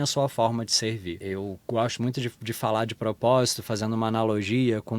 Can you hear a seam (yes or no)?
yes